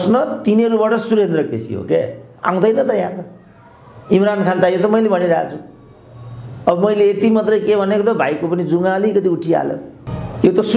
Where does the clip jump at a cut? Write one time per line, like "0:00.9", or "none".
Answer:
none